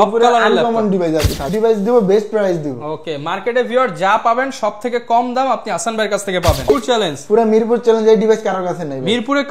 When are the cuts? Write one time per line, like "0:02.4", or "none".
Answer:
0:01.4
0:06.7